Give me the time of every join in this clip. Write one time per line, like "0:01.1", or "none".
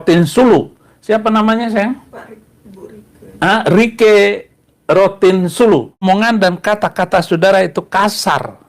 0:06.0